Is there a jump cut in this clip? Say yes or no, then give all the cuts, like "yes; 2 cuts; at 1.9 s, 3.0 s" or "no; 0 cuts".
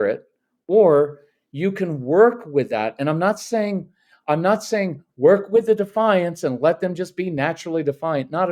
no; 0 cuts